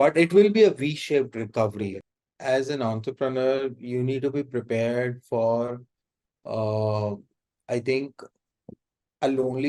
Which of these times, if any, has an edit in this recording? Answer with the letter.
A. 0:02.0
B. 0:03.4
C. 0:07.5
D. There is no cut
A